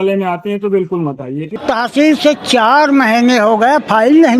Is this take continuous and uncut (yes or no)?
no